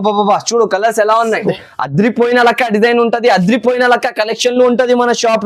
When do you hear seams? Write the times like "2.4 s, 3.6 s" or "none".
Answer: 1.5 s

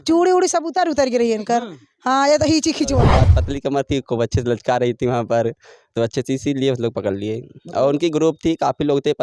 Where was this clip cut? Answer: 3.2 s

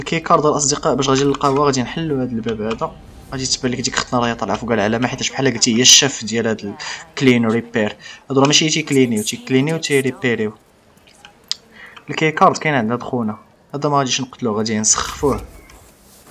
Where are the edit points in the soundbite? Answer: none

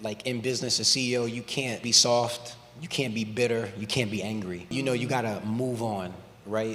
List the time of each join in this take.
1.8 s, 4.7 s

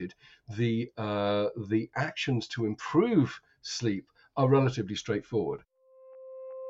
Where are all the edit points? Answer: 5.7 s

